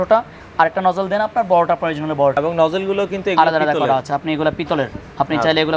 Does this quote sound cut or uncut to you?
cut